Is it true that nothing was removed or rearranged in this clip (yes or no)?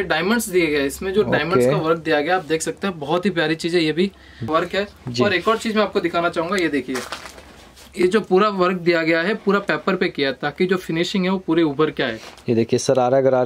no